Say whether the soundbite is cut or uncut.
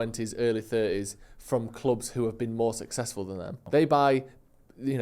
cut